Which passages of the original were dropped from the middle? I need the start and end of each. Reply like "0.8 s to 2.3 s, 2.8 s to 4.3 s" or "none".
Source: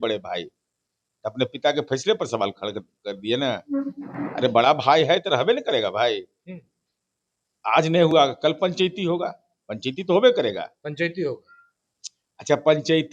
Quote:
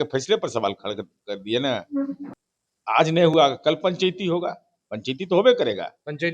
4.0 s to 7.1 s